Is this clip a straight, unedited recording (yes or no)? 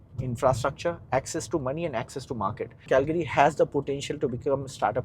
no